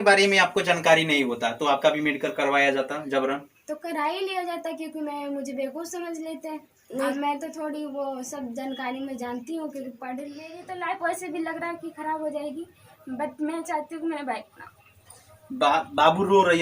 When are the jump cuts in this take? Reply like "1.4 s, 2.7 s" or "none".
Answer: 10.6 s